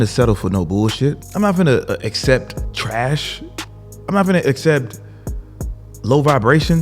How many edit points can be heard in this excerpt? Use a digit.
2